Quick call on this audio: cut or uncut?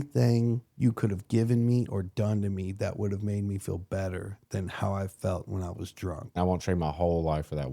cut